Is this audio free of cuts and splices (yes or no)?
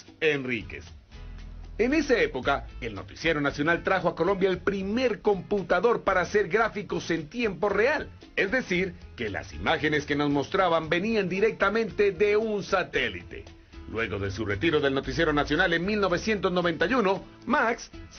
no